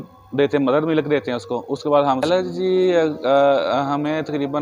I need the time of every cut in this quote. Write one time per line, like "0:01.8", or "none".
0:02.2